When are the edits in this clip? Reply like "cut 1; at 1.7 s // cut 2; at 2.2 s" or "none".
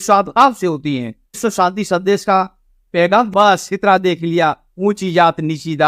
cut 1; at 1.4 s // cut 2; at 3.3 s